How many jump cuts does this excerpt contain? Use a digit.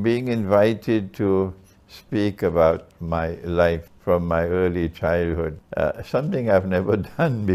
2